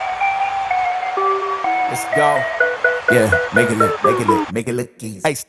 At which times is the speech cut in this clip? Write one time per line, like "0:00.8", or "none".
none